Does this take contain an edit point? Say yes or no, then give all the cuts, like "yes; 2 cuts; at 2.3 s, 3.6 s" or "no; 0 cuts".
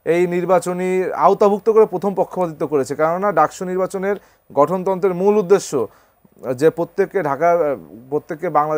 no; 0 cuts